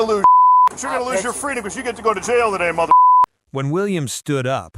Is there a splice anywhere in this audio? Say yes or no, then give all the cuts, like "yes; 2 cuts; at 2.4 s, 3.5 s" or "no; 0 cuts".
no; 0 cuts